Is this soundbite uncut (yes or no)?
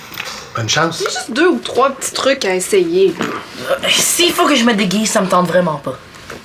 no